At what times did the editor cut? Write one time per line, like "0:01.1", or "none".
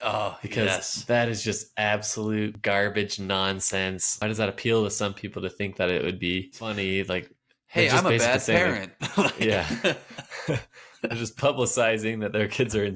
0:02.6
0:04.2
0:06.7